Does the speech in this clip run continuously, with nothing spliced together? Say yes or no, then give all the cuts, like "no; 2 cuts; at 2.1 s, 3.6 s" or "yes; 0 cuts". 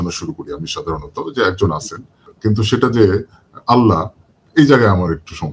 no; 1 cut; at 2.2 s